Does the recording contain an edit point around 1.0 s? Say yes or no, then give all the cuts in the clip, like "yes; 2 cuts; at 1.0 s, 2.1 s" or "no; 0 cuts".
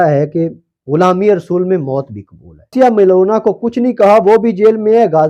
no; 1 cut; at 2.7 s